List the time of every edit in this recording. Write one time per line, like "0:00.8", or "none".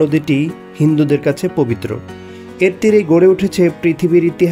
none